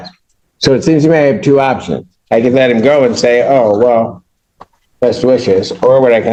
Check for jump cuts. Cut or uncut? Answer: uncut